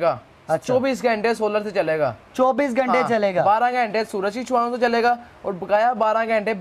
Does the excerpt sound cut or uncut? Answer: uncut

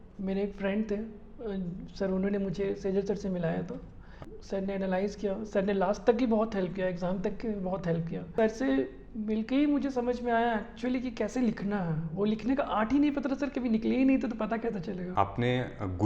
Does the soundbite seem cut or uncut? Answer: cut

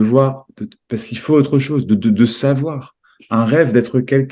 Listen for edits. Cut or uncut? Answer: uncut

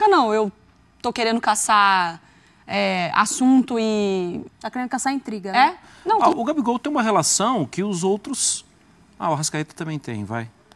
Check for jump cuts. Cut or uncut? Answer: cut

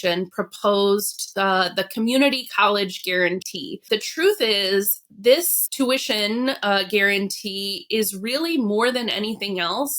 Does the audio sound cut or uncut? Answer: cut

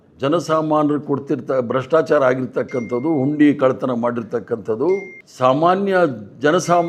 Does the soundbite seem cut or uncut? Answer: uncut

